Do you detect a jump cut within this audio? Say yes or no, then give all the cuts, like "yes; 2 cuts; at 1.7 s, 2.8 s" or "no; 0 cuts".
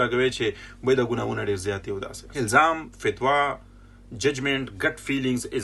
yes; 1 cut; at 2.2 s